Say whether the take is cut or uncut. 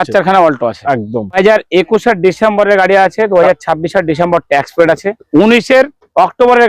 cut